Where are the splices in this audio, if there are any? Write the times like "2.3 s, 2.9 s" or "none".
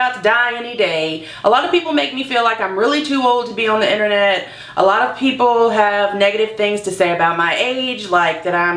none